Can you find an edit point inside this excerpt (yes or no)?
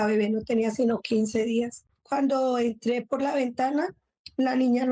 yes